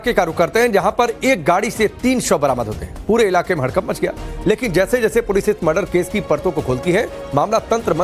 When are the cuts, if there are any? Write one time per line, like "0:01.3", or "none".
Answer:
none